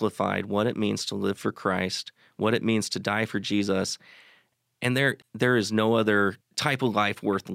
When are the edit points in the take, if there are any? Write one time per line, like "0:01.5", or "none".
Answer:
0:05.2
0:06.5